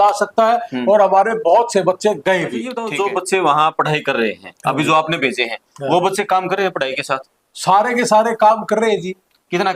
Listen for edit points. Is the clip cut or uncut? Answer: cut